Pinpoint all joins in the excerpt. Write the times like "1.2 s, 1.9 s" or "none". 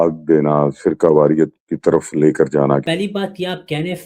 2.8 s